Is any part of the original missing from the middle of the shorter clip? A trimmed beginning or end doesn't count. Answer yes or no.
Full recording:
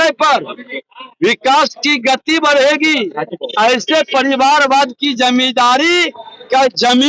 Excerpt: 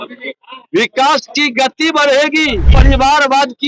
yes